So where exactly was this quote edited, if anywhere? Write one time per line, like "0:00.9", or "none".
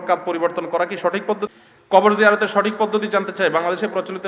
0:01.5

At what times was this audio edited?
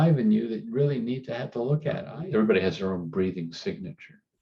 0:02.0

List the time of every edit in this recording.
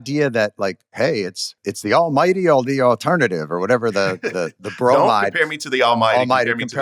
0:01.6
0:05.3

